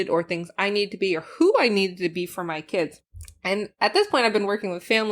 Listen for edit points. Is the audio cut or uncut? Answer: cut